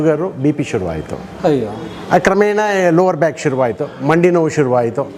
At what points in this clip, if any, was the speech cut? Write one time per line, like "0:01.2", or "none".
none